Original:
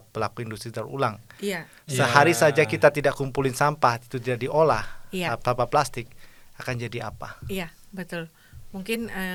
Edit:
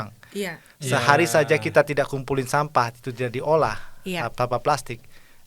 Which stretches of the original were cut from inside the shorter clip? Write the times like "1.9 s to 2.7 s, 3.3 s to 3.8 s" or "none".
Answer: none